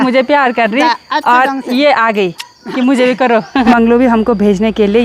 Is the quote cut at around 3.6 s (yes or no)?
yes